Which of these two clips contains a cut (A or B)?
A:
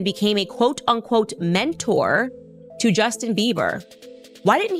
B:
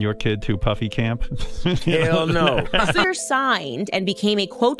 B